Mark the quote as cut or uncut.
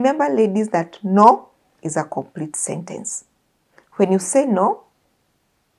uncut